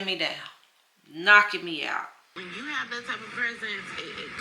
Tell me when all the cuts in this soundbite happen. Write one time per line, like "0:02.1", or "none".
0:02.4